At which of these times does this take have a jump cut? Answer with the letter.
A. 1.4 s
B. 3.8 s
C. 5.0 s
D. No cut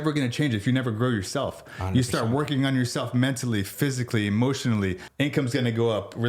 C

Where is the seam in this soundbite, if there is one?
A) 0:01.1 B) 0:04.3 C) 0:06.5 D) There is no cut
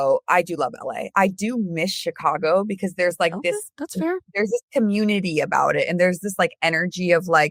D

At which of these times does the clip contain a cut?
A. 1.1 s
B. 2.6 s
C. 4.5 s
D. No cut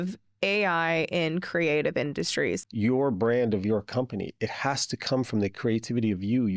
B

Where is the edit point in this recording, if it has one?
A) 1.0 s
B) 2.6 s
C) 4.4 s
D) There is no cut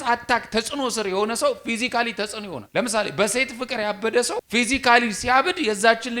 C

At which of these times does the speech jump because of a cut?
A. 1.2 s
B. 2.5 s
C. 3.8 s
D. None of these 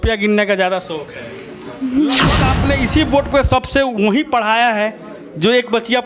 B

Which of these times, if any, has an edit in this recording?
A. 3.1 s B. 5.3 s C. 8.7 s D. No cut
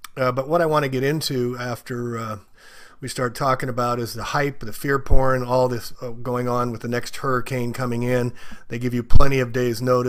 D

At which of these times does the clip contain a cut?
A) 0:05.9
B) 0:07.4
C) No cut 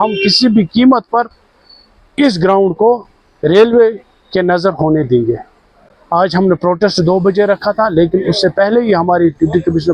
C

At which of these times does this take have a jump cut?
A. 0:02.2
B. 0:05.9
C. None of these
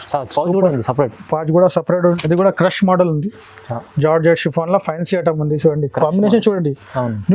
A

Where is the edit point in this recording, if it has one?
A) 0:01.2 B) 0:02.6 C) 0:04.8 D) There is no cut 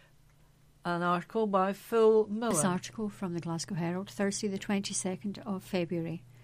B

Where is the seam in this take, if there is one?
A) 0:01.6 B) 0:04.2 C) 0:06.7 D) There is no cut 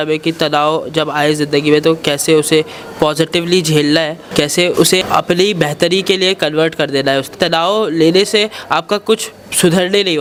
D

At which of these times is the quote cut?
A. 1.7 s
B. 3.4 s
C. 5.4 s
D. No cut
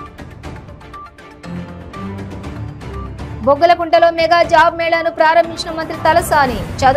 B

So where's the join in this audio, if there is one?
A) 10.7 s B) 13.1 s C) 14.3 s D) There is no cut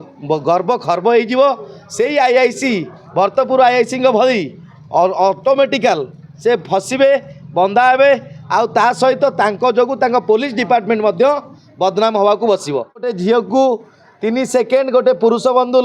B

